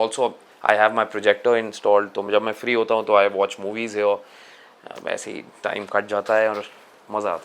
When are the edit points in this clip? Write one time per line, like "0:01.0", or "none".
none